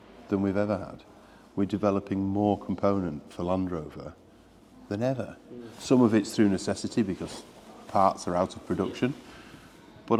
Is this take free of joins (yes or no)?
yes